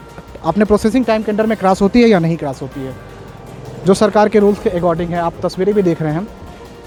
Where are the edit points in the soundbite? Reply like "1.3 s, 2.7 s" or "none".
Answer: none